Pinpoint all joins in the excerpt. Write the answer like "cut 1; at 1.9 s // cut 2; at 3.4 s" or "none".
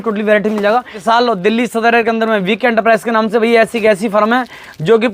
cut 1; at 1.0 s